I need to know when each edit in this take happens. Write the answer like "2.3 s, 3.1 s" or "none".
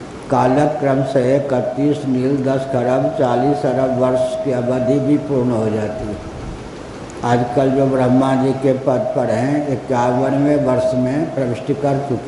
none